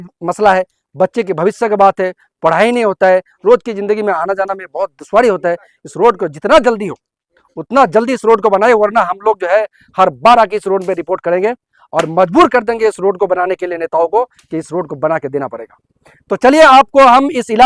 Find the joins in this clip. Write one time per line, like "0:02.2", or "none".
none